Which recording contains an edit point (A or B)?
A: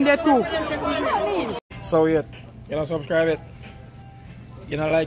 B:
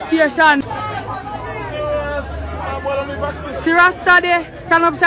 A